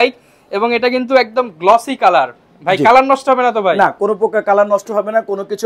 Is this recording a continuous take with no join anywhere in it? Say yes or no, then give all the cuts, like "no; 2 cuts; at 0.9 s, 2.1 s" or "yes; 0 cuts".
yes; 0 cuts